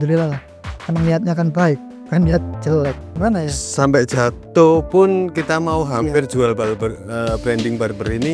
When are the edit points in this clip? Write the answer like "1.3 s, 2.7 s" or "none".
3.1 s